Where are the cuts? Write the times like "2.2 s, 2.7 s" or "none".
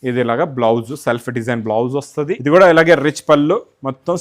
2.4 s